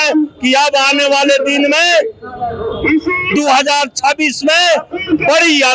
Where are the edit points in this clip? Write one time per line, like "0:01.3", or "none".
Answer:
none